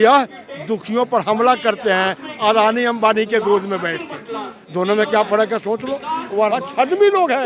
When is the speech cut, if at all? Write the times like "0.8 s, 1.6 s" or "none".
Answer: 6.2 s